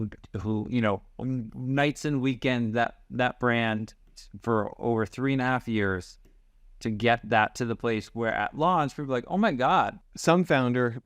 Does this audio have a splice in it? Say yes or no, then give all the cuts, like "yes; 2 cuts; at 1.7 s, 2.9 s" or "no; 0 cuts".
yes; 1 cut; at 10.0 s